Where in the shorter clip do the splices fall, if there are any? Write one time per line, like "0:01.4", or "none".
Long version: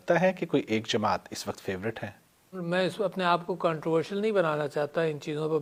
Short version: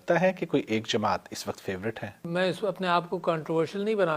0:02.1